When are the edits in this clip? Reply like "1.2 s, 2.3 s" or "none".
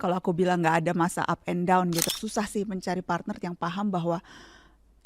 2.1 s